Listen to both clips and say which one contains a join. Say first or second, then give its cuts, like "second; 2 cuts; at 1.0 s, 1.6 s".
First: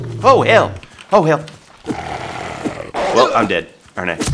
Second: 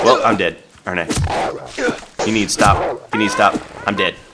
second; 1 cut; at 2.2 s